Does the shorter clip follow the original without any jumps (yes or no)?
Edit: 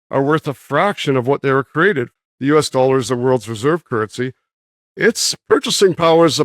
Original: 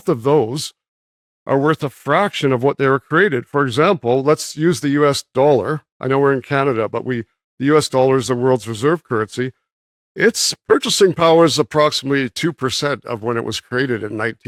no